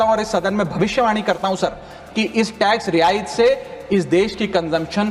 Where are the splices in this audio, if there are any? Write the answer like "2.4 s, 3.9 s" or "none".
none